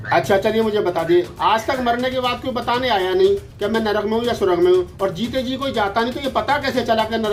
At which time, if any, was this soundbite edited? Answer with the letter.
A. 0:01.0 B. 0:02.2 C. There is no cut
C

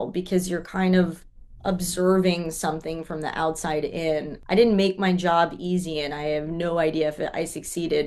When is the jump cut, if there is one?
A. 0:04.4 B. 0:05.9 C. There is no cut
A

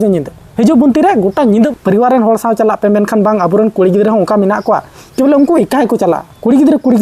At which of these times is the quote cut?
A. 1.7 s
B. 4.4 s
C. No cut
A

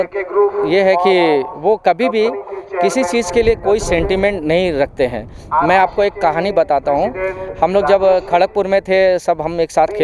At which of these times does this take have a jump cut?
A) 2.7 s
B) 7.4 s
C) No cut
C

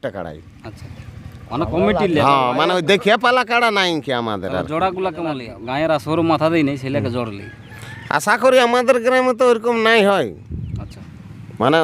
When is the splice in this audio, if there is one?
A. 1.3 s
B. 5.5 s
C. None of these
B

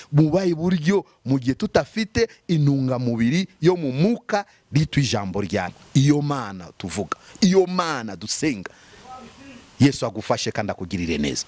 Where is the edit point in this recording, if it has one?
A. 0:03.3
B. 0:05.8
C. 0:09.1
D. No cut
B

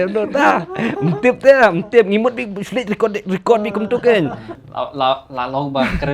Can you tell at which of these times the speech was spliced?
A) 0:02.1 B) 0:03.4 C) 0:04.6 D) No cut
C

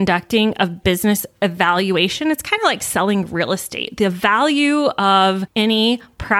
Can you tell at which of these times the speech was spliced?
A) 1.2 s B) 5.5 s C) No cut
B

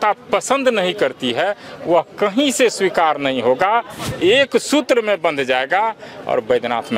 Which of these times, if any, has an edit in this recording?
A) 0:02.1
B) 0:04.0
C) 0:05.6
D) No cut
B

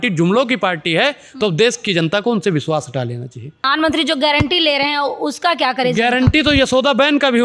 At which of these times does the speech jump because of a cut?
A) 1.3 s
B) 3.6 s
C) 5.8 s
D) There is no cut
B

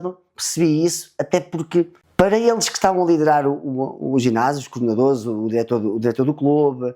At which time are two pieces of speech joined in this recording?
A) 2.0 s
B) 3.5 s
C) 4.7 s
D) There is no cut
A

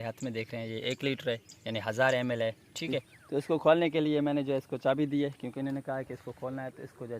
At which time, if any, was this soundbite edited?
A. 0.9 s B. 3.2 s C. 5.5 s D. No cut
B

